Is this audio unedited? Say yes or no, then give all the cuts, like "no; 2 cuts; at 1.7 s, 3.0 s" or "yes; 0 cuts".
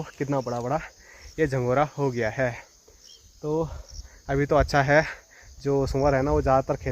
yes; 0 cuts